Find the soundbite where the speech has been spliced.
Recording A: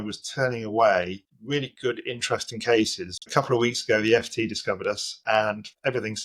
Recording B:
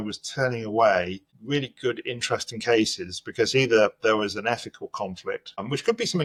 A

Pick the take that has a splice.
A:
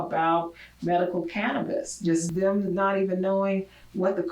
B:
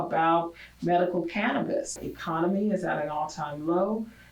B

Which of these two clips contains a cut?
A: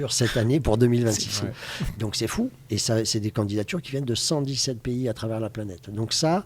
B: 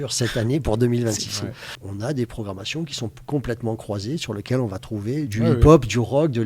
B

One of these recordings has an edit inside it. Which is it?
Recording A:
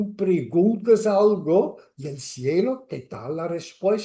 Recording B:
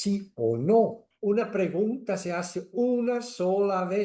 B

